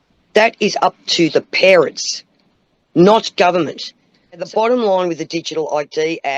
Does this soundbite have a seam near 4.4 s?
yes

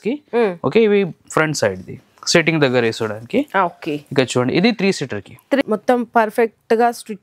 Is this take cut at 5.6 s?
yes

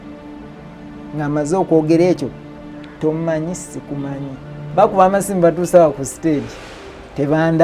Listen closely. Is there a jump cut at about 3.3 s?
no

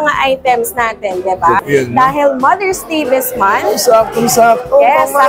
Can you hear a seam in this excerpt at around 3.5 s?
no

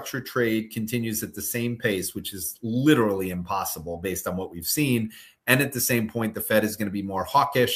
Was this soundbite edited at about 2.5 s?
no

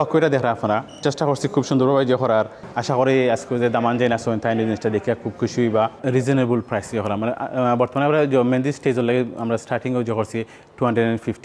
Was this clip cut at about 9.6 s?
no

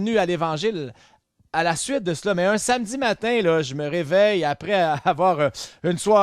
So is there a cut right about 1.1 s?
no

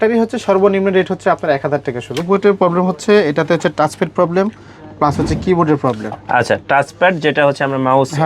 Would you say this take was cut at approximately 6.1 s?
no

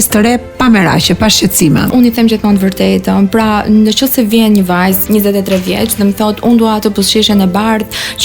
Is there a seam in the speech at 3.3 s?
no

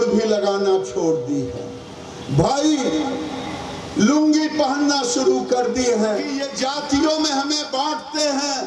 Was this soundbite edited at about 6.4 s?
yes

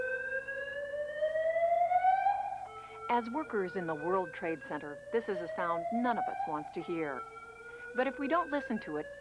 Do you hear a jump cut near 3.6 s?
yes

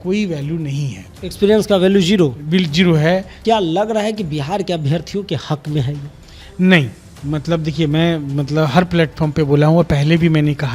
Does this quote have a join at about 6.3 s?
no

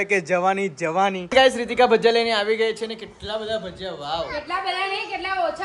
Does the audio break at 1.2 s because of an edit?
yes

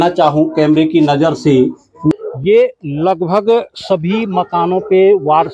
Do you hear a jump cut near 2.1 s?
yes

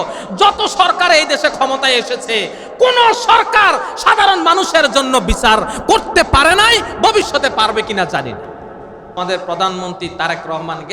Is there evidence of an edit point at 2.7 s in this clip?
no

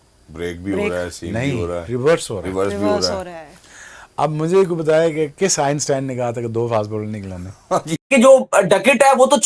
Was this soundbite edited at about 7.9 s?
yes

